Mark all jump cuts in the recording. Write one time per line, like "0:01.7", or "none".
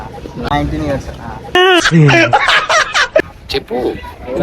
0:03.4